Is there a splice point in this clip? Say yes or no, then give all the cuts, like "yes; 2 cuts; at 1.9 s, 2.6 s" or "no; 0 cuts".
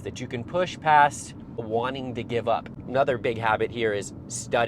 yes; 2 cuts; at 1.6 s, 2.7 s